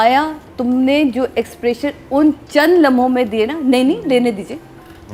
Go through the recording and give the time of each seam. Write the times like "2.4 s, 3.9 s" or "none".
none